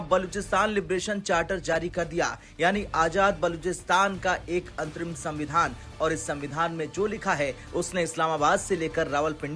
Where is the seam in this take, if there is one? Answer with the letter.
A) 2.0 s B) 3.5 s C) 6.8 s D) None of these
D